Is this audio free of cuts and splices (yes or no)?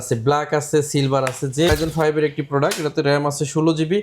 no